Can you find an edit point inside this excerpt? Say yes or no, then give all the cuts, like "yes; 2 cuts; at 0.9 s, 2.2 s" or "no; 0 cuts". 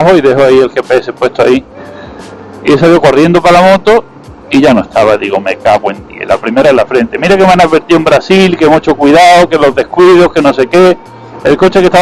no; 0 cuts